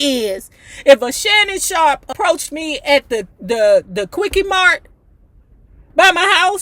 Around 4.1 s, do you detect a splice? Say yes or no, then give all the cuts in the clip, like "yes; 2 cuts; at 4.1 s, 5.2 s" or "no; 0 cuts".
no; 1 cut; at 2.1 s